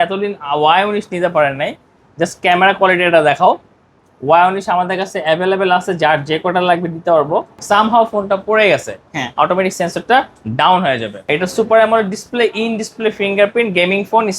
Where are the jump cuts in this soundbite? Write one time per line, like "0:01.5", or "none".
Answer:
0:07.6
0:11.3